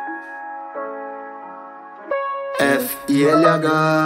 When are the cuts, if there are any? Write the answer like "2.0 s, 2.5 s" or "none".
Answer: 1.3 s